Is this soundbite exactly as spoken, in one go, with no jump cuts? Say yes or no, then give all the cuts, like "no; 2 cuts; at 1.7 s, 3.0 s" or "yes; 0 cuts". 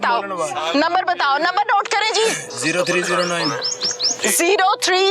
no; 1 cut; at 2.5 s